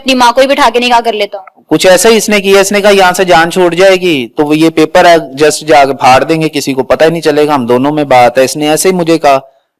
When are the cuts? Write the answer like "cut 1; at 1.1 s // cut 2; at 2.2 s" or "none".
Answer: none